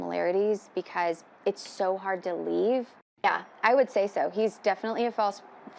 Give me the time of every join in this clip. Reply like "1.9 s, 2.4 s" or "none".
3.2 s